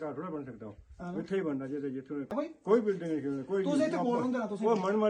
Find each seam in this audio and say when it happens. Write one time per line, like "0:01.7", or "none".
0:02.3